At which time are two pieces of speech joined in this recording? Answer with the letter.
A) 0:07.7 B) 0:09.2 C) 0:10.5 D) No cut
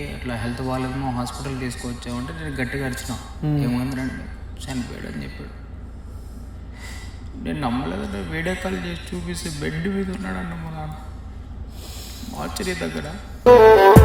D